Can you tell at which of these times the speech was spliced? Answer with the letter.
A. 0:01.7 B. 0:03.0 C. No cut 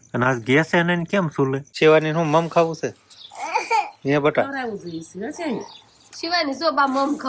A